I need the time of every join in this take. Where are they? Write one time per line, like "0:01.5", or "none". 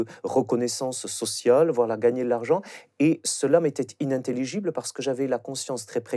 0:03.2